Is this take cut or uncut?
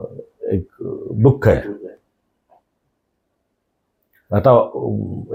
uncut